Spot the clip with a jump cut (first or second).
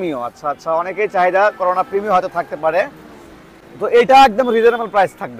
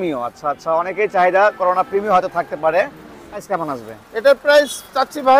second